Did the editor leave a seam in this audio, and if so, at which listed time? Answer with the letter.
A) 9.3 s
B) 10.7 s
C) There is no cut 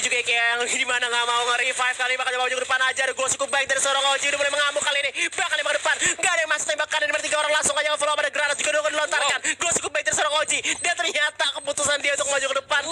C